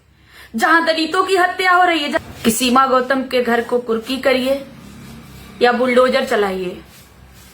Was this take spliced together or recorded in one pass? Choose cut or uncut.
cut